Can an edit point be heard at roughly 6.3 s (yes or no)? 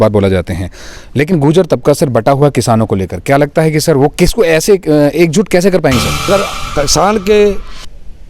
yes